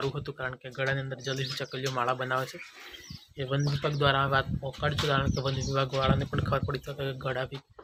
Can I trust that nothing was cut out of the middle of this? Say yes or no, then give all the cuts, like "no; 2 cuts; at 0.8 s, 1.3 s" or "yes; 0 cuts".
yes; 0 cuts